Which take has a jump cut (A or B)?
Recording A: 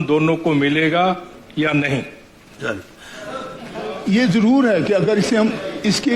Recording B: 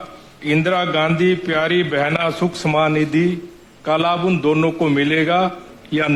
A